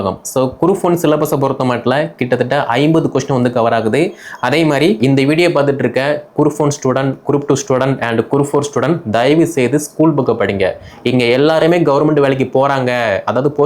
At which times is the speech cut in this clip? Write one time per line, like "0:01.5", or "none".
0:05.0